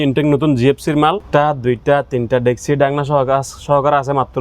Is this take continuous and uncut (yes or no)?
no